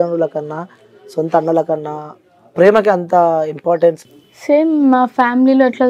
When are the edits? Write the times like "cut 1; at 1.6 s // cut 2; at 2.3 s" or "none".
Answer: cut 1; at 4.0 s